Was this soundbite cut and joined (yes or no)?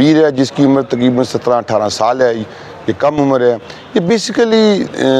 no